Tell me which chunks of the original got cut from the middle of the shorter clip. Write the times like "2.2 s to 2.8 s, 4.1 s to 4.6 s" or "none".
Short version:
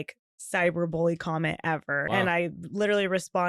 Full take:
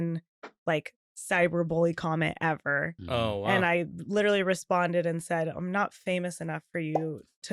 2.8 s to 3.4 s

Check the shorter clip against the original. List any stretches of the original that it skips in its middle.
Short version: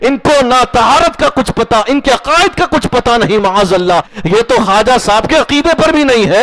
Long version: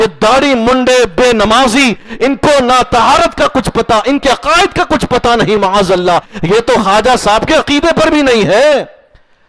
none

